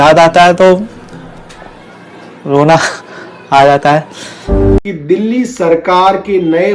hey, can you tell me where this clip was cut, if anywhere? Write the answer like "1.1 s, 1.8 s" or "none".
4.8 s